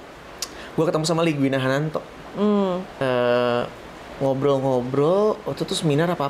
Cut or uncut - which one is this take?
cut